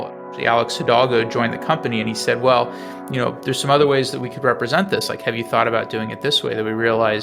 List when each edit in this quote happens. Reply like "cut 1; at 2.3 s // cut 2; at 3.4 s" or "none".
none

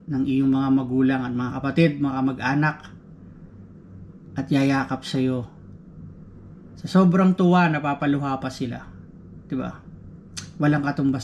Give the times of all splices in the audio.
none

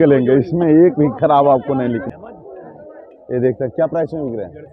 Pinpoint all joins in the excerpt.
cut 1; at 2.1 s

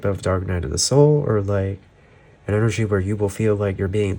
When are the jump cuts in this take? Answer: none

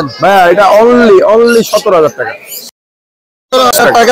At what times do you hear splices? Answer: none

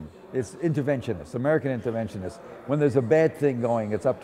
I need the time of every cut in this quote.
none

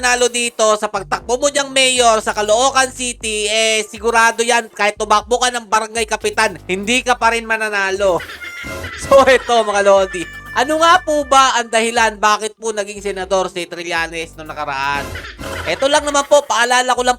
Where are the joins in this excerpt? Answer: none

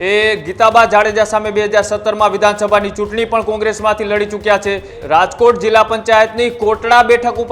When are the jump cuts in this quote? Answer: cut 1; at 5.0 s

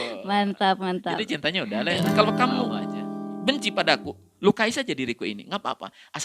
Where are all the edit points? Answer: cut 1; at 2.0 s

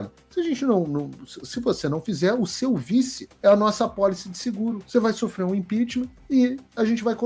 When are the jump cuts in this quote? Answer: cut 1; at 3.2 s // cut 2; at 6.4 s

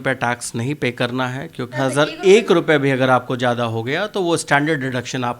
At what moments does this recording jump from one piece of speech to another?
cut 1; at 1.7 s

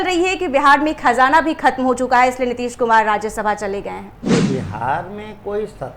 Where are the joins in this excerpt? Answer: cut 1; at 4.2 s

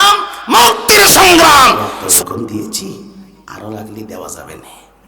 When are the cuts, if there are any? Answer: cut 1; at 2.0 s

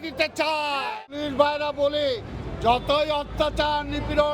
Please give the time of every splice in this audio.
cut 1; at 1.2 s

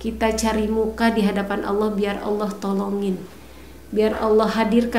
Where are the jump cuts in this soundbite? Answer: none

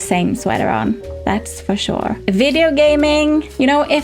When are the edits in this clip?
cut 1; at 2.2 s

